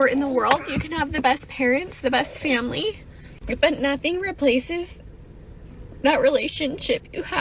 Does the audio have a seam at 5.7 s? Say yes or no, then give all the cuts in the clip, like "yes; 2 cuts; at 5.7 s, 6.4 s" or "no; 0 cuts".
no; 0 cuts